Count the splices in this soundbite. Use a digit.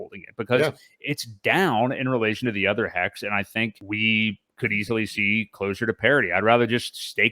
1